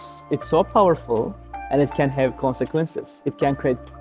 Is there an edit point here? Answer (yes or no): no